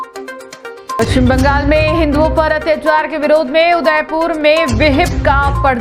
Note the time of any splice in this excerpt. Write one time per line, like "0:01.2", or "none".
0:00.9